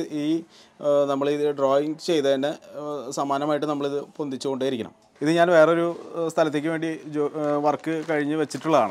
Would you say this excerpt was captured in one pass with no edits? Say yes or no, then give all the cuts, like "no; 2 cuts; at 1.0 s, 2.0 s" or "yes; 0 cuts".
no; 1 cut; at 5.0 s